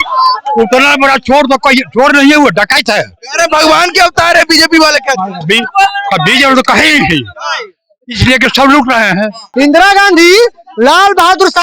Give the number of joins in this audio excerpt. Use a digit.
1